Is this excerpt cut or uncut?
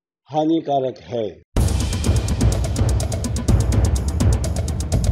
cut